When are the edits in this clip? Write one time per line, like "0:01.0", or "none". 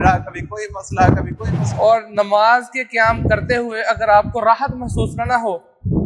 0:01.6

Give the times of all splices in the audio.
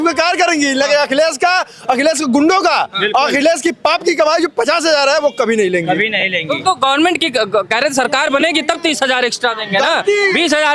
none

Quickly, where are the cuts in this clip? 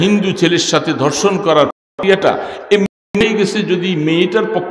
none

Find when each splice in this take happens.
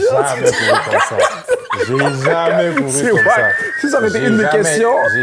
none

